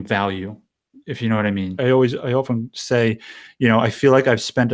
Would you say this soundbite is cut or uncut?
cut